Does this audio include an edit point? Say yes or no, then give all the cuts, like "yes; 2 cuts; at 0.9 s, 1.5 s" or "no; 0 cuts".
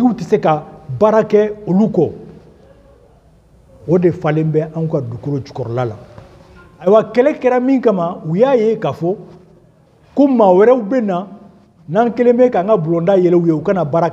yes; 1 cut; at 6.9 s